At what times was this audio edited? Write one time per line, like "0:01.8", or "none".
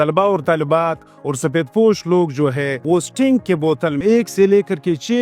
0:02.8
0:04.0